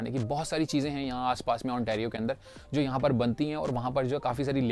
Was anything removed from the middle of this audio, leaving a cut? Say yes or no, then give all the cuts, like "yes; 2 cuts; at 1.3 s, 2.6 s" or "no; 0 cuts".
no; 0 cuts